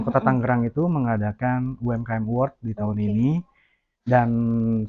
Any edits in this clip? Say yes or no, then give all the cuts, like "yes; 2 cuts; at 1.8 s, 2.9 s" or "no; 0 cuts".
no; 0 cuts